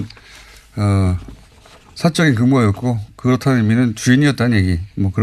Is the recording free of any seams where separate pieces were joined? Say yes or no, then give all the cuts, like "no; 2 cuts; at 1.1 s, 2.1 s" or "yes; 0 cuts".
yes; 0 cuts